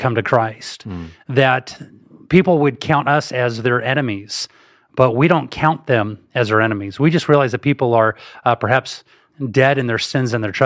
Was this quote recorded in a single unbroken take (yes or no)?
yes